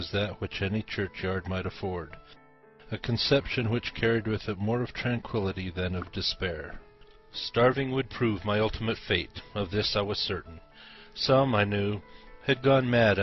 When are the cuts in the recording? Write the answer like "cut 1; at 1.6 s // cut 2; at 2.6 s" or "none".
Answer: none